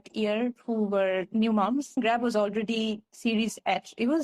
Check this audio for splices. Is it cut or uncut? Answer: cut